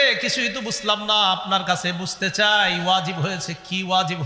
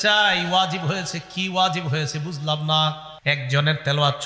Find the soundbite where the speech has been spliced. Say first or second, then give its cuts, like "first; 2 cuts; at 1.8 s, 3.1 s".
second; 1 cut; at 3.1 s